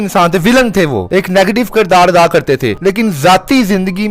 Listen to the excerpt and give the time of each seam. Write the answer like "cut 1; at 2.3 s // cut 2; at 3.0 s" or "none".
cut 1; at 1.0 s // cut 2; at 2.7 s

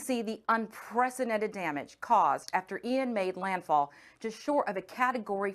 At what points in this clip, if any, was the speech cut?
none

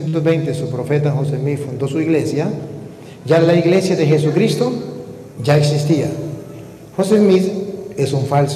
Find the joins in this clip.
none

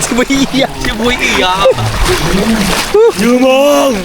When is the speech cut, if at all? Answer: none

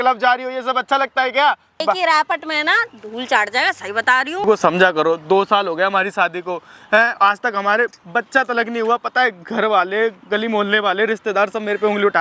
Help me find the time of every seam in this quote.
cut 1; at 1.8 s // cut 2; at 4.4 s

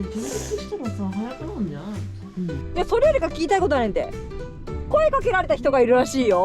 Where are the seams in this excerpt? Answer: cut 1; at 2.7 s

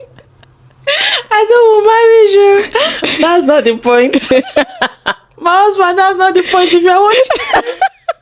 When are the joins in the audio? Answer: none

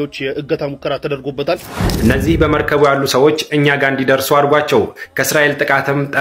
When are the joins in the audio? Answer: cut 1; at 1.8 s

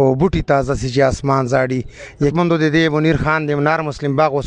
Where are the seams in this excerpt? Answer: cut 1; at 2.3 s

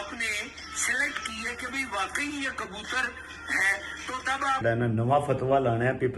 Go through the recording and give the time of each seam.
cut 1; at 4.6 s

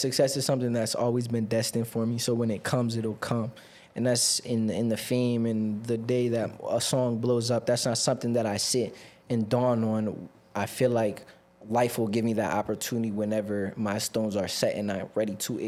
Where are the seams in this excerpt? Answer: none

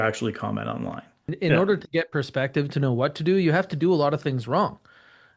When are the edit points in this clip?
cut 1; at 1.3 s

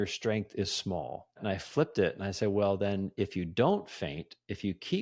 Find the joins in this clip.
cut 1; at 1.4 s

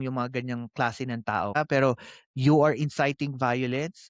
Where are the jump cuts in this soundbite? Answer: cut 1; at 1.6 s

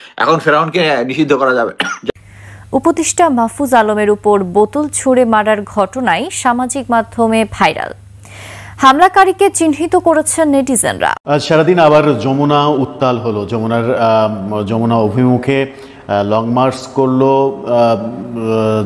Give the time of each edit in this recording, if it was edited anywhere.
cut 1; at 2.1 s // cut 2; at 11.2 s

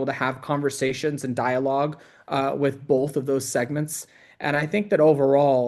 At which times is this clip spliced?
none

